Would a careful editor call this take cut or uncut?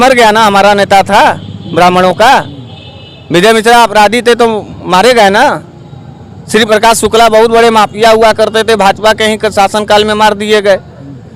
uncut